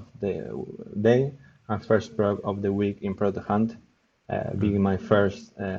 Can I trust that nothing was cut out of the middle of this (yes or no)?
yes